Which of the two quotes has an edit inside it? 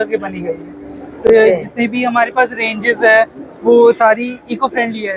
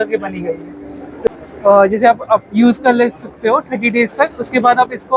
second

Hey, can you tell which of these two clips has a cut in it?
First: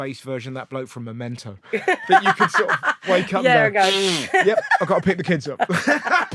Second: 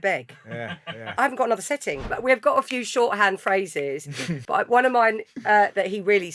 second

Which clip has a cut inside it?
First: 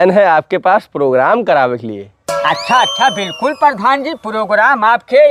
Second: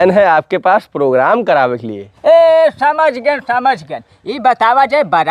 second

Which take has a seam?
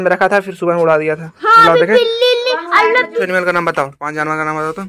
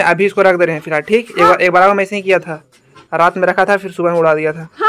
first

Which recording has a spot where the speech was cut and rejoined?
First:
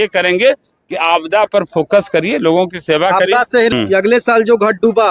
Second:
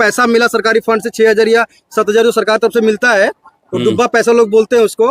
first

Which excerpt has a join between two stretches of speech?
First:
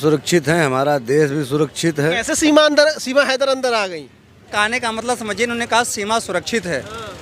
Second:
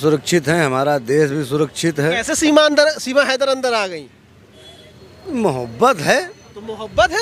first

